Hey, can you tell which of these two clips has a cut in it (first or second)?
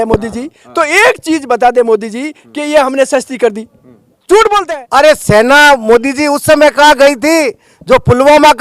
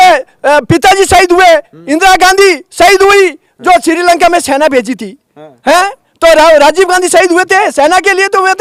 first